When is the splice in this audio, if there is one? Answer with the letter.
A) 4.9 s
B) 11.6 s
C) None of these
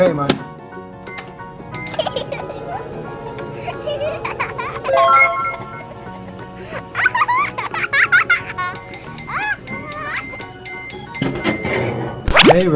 A